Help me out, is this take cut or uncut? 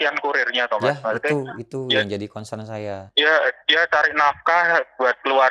cut